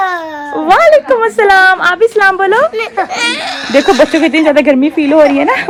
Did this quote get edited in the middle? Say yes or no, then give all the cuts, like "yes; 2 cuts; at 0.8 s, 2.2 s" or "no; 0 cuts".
no; 0 cuts